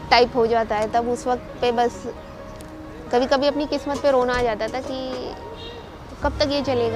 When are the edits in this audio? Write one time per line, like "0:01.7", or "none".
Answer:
none